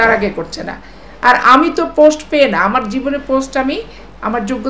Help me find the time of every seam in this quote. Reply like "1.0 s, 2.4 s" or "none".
none